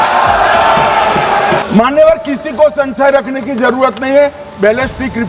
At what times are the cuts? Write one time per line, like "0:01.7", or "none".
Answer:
0:01.6